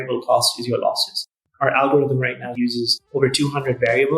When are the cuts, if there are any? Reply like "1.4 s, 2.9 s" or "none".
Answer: 1.4 s, 2.9 s